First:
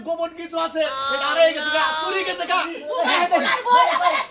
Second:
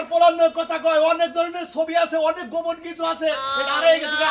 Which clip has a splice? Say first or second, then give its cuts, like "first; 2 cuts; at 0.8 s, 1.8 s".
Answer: first; 1 cut; at 2.8 s